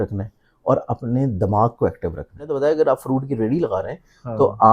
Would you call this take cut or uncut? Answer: cut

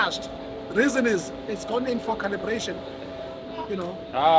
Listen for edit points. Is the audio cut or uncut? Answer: uncut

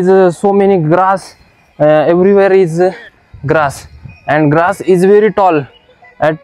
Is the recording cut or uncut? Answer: uncut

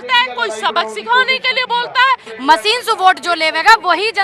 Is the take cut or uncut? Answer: cut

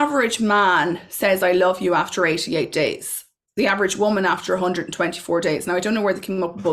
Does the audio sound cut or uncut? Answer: uncut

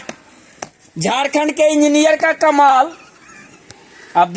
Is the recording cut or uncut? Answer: uncut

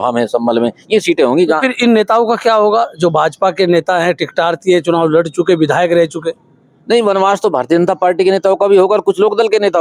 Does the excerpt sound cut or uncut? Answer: uncut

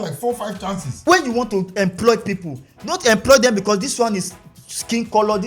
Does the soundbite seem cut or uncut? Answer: cut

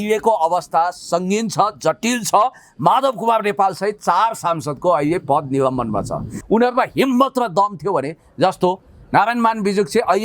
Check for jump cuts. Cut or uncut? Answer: cut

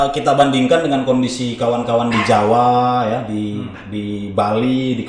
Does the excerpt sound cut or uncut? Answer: uncut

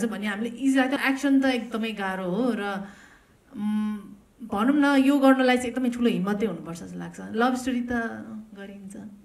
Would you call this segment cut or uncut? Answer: cut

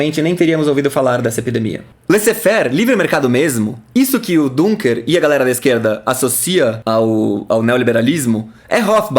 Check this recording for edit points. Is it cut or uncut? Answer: cut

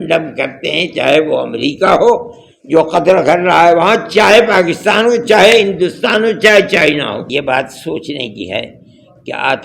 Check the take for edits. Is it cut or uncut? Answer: cut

